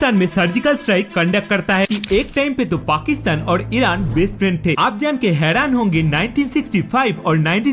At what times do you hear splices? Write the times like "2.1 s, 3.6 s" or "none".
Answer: 1.9 s, 4.8 s